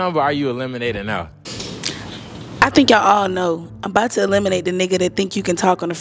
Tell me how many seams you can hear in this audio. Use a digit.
0